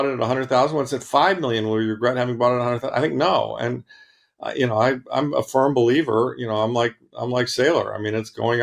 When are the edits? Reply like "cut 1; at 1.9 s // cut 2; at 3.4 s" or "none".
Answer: none